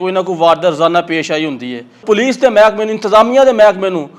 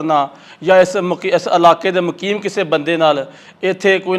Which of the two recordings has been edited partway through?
first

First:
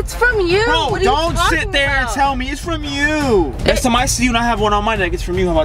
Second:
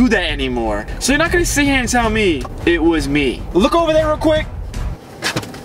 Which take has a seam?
second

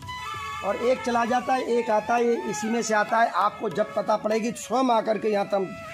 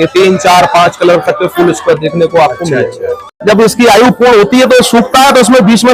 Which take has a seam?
second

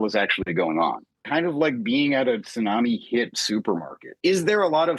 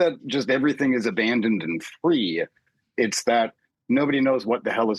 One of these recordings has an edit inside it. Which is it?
first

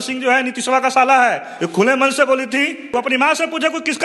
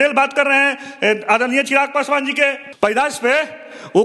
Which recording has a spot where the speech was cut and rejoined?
first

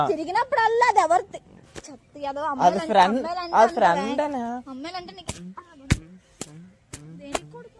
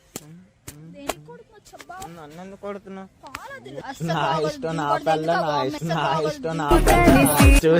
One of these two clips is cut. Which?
second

